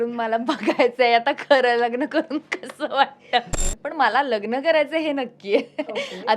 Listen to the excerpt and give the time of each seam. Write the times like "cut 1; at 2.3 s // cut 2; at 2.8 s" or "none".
cut 1; at 3.6 s